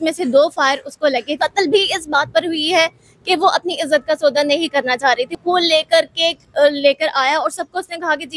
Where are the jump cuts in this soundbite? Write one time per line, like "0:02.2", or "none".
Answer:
0:01.3
0:05.4